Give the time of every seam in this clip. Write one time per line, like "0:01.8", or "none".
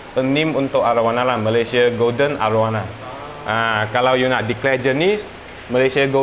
none

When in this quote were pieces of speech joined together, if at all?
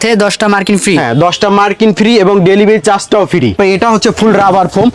0:03.5

